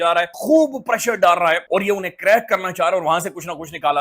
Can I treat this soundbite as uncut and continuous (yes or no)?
yes